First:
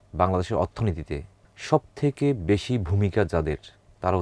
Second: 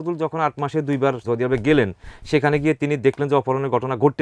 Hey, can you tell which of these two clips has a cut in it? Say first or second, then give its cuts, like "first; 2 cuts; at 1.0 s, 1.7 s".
second; 1 cut; at 1.2 s